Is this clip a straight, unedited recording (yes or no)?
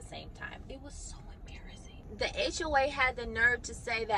no